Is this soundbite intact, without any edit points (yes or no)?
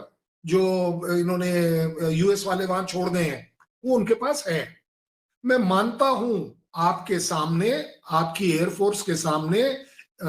yes